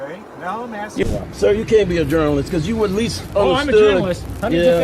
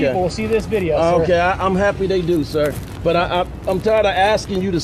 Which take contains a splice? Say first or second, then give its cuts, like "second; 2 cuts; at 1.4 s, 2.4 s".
first; 1 cut; at 1.0 s